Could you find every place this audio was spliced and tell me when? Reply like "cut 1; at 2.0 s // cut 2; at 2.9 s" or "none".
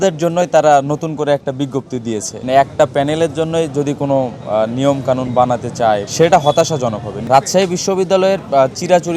cut 1; at 2.4 s // cut 2; at 6.1 s // cut 3; at 7.2 s